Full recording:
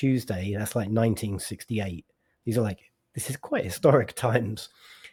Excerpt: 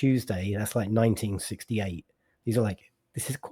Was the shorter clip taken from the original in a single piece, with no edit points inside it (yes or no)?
yes